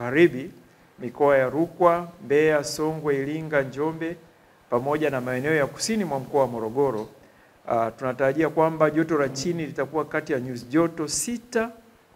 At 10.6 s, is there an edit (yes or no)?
no